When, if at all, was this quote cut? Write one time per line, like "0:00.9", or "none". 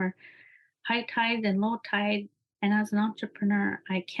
0:02.3